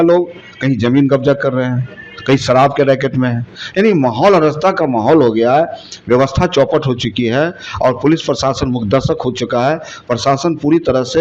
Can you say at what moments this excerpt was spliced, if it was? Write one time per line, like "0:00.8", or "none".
none